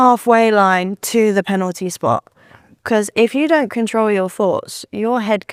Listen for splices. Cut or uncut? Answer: uncut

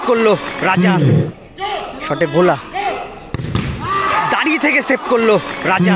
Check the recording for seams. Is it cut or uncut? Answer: cut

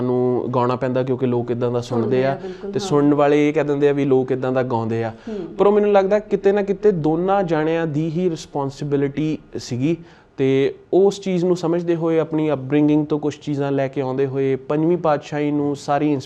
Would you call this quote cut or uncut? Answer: uncut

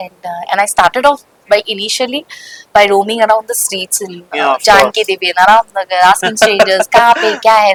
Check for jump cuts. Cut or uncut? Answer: uncut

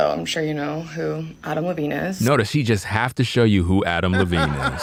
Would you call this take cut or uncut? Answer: uncut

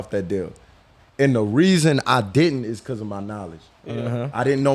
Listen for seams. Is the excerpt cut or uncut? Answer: uncut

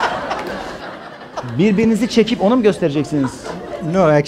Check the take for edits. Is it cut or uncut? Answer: uncut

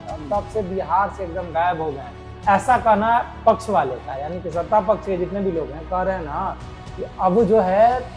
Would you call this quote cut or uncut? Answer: uncut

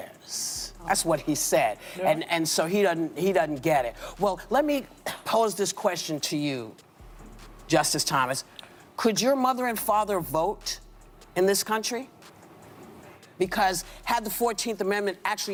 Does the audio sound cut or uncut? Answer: uncut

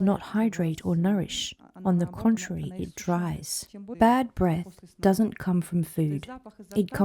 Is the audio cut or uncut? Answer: cut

